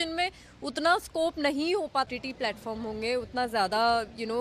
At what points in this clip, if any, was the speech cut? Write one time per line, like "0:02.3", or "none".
0:02.1